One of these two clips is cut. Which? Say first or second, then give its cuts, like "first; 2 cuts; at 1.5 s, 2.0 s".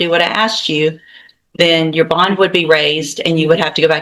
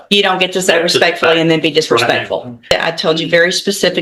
second; 1 cut; at 2.7 s